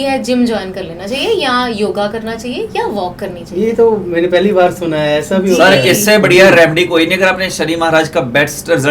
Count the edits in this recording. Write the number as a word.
zero